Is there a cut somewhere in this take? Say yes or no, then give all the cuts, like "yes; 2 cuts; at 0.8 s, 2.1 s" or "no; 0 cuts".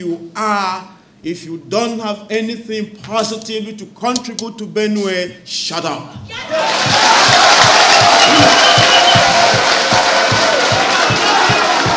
no; 0 cuts